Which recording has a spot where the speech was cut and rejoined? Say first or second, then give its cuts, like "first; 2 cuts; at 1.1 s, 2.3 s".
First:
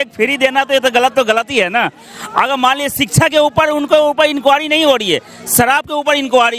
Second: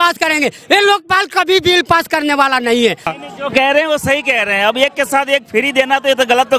second; 1 cut; at 3.1 s